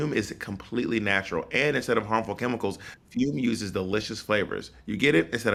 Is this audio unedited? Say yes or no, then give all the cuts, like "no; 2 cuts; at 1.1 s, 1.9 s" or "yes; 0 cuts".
yes; 0 cuts